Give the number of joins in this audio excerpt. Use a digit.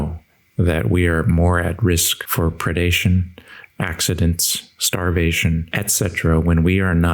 2